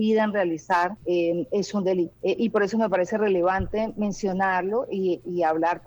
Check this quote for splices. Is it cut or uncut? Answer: cut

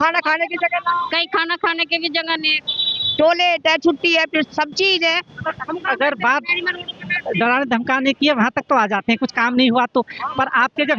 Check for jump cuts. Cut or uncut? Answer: uncut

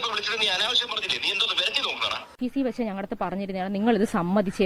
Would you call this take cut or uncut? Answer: cut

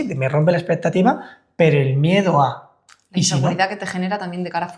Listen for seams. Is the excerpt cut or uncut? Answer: uncut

